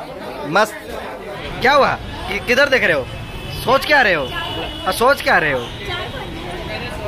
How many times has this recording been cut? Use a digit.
1